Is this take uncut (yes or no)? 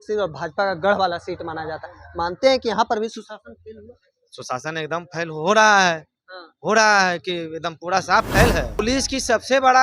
no